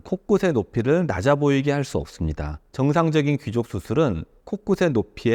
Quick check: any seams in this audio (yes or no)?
yes